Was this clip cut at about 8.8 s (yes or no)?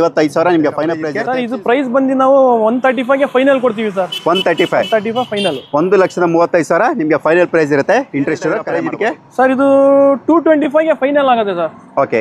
yes